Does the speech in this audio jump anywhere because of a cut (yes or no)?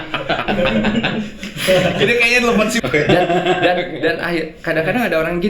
yes